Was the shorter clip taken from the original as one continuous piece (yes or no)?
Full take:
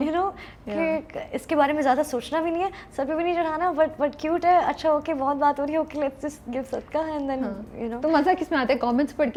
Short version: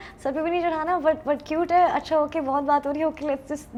yes